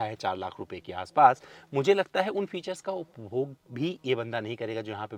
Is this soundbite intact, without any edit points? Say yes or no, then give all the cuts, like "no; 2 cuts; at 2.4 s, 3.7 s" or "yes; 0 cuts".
yes; 0 cuts